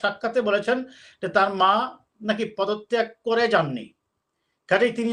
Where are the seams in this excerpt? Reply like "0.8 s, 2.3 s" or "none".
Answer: none